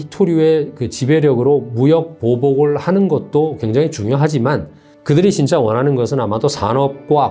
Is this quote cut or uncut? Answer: uncut